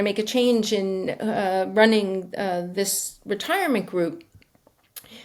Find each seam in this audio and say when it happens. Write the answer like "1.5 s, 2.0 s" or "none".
none